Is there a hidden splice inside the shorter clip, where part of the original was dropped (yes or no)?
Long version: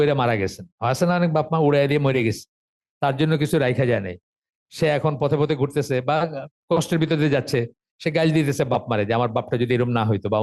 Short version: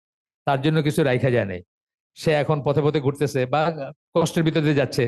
no